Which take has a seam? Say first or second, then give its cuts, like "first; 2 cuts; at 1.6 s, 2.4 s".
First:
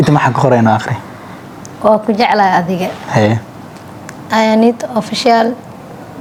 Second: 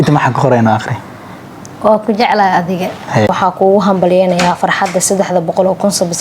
second; 1 cut; at 3.3 s